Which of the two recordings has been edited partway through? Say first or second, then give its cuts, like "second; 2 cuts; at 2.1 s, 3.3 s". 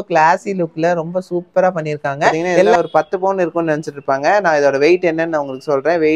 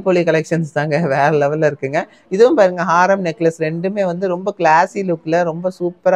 first; 1 cut; at 2.7 s